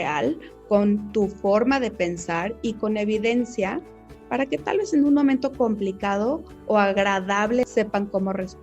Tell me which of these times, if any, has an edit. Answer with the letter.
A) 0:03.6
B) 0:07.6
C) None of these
B